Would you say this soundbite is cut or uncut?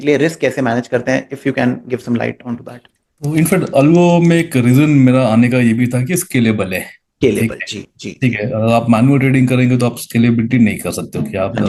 uncut